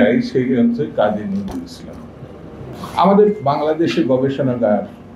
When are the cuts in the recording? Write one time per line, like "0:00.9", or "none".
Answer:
0:02.7